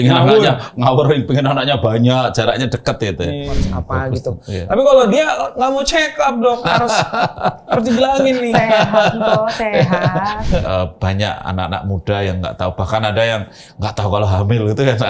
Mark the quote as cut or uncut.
cut